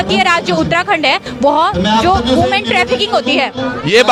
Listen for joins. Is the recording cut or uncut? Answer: uncut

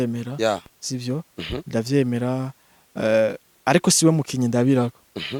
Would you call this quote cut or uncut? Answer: uncut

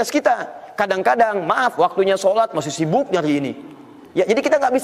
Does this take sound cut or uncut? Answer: uncut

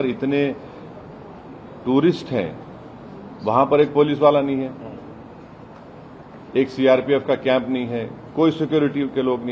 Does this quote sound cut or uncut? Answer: uncut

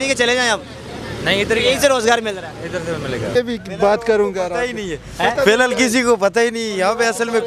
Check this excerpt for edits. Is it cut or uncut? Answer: cut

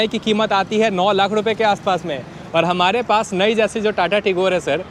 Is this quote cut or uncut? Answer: uncut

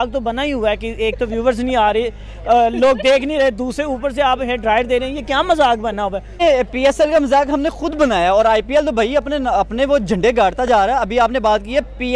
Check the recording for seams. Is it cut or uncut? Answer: uncut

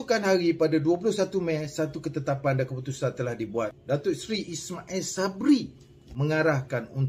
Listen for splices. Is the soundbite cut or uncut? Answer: cut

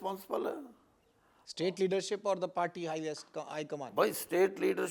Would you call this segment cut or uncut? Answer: uncut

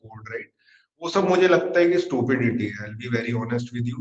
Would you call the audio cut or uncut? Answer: uncut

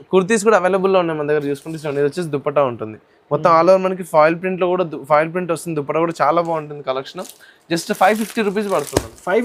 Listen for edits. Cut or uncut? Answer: uncut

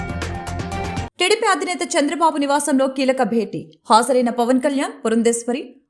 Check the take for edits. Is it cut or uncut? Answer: cut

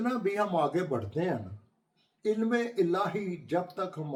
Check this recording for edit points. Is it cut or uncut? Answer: uncut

